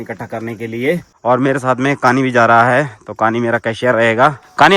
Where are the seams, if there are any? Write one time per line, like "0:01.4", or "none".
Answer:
none